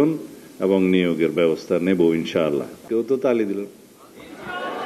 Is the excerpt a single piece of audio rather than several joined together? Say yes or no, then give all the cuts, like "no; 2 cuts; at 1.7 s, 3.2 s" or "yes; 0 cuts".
no; 1 cut; at 2.8 s